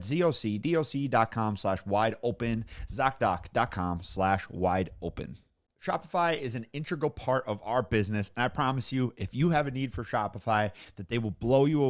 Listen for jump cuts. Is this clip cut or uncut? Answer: uncut